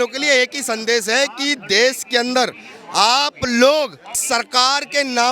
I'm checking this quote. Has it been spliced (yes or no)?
yes